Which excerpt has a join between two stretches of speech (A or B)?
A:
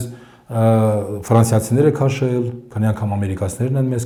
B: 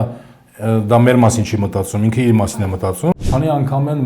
B